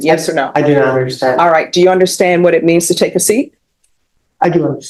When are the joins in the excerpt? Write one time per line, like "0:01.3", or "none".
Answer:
none